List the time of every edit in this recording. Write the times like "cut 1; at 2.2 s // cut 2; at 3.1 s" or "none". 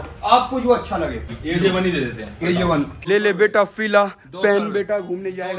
cut 1; at 1.4 s // cut 2; at 2.9 s